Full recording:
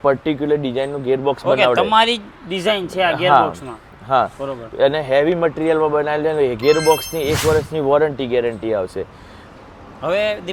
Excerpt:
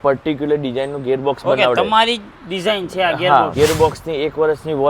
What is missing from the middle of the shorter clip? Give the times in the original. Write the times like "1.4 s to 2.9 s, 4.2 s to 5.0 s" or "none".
3.5 s to 6.6 s

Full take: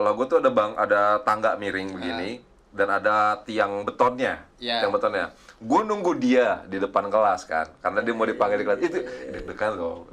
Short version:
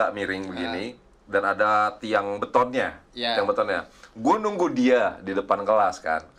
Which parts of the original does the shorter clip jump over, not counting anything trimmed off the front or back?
none

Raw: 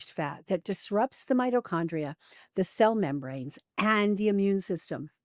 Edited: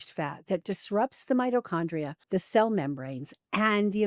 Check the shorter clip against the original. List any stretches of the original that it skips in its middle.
2.1 s to 2.4 s

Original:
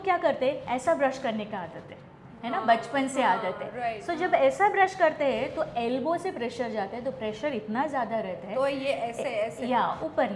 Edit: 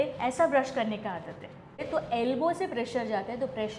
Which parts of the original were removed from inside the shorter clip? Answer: 2.3 s to 5.5 s

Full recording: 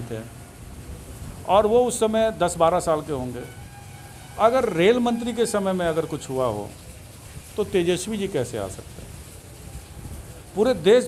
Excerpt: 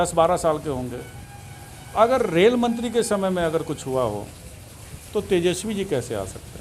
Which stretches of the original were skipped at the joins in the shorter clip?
none

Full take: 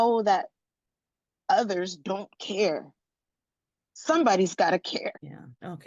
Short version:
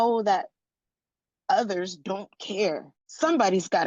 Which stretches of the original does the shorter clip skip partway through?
3.0 s to 3.8 s

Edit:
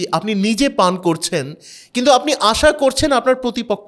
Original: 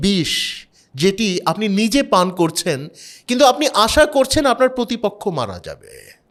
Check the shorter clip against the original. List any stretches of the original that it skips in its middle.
none

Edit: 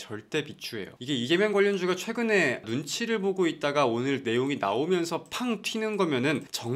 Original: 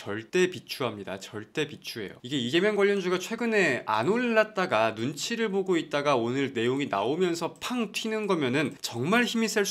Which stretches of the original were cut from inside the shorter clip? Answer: 3.9 s to 4.9 s

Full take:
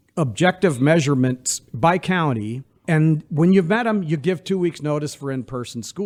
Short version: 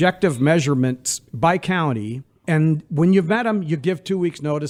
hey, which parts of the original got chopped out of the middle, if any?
none

